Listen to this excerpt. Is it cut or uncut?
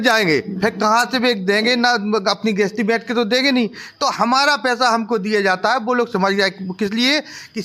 uncut